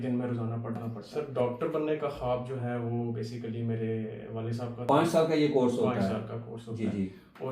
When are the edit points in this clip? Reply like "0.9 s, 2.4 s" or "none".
1.0 s, 4.8 s